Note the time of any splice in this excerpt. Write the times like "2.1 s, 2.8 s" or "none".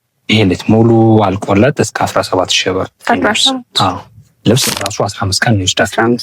4.7 s